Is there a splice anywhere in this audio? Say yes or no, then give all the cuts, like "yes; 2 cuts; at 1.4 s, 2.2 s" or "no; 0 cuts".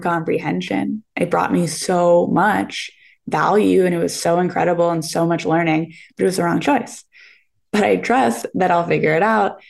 no; 0 cuts